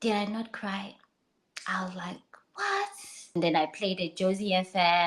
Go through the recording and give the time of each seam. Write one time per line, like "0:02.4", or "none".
0:03.3